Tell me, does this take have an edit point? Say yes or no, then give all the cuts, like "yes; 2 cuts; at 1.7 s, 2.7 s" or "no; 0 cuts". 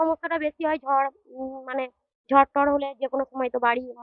no; 0 cuts